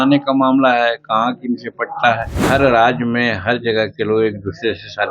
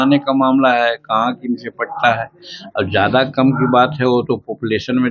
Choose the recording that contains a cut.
first; 1 cut; at 2.4 s

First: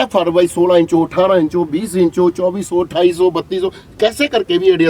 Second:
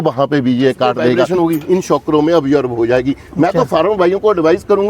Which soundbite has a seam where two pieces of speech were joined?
second; 1 cut; at 1.2 s

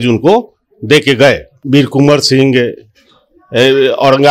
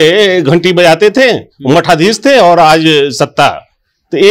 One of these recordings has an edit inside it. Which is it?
first; 1 cut; at 1.5 s

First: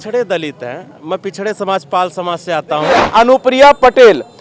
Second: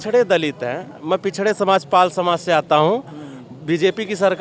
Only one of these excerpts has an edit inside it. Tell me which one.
first; 1 cut; at 3.0 s

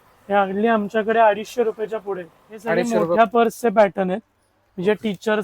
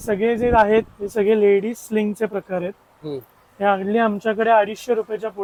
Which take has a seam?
first; 1 cut; at 3.2 s

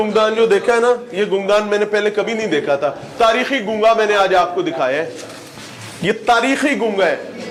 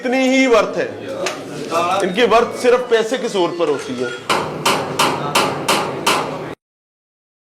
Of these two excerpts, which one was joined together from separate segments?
second; 1 cut; at 4.5 s

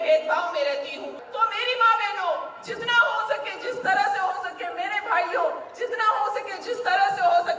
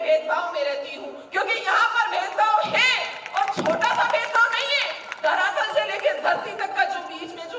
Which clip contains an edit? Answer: first; 1 cut; at 1.2 s

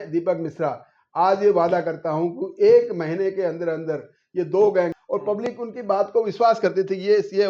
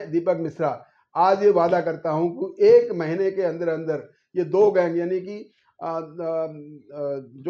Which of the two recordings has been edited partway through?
first; 1 cut; at 4.9 s

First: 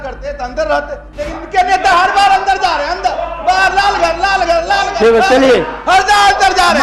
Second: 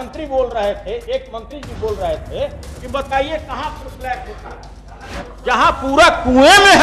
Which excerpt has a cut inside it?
second; 1 cut; at 5.2 s

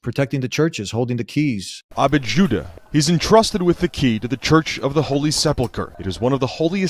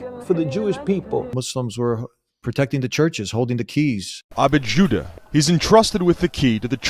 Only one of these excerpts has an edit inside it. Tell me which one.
second; 1 cut; at 1.4 s

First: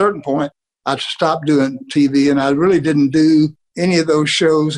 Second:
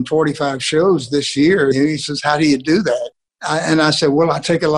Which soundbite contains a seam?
second; 1 cut; at 1.8 s

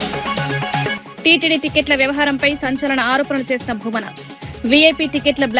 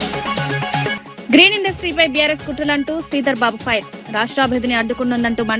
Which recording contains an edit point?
second; 1 cut; at 1.1 s

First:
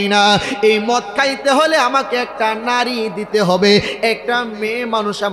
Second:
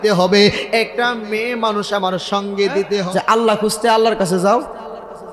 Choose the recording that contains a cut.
second; 1 cut; at 3.0 s

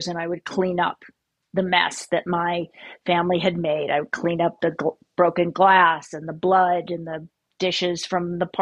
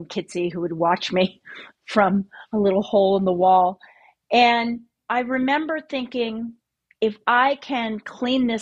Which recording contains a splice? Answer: second; 1 cut; at 5.0 s

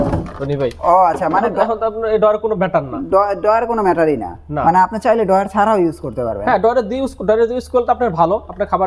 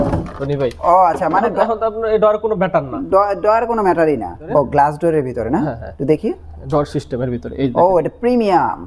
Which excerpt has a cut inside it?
second; 1 cut; at 4.4 s

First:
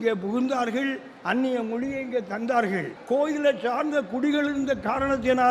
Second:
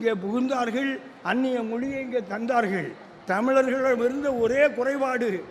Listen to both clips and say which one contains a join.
first; 1 cut; at 2.9 s

